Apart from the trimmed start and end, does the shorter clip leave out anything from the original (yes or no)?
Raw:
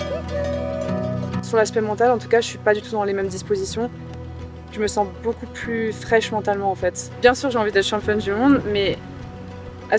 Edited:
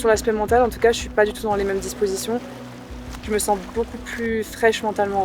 no